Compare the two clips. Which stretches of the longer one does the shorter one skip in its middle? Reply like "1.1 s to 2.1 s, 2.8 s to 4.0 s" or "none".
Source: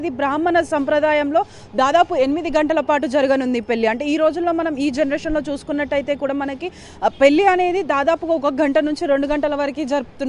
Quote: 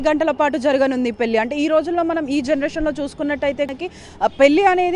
6.2 s to 6.5 s